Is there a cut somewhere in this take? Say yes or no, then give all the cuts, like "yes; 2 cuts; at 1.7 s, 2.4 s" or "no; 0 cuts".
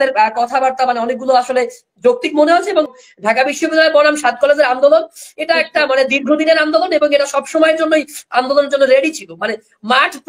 yes; 1 cut; at 2.9 s